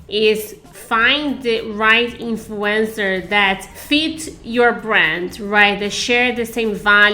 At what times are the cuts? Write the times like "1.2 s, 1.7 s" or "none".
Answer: 3.7 s